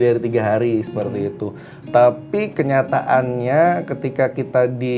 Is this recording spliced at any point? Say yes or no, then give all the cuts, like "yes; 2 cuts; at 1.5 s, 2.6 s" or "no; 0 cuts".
no; 0 cuts